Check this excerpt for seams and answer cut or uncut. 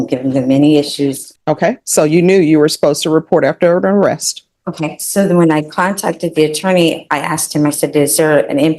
cut